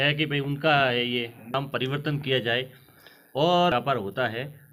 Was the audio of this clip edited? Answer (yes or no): yes